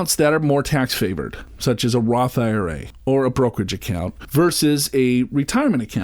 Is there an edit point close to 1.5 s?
no; 0 cuts

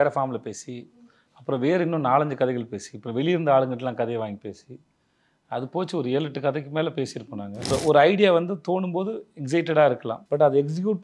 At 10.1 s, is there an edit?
yes; 2 cuts; at 7.7 s, 10.1 s

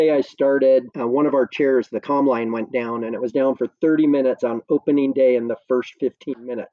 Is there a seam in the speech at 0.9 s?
yes; 1 cut; at 0.9 s

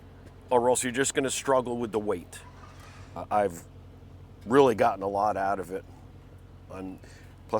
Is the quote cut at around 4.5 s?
no; 1 cut; at 3.2 s

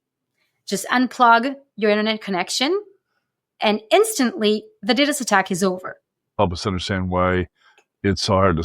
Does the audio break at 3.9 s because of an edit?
no; 1 cut; at 6.4 s

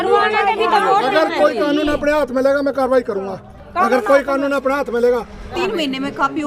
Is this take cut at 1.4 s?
no; 1 cut; at 5.5 s

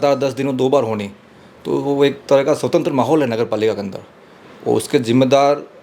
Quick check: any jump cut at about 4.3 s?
no; 0 cuts

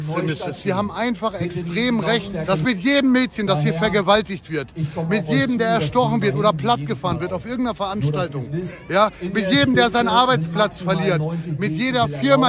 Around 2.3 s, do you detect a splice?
yes; 1 cut; at 2.3 s

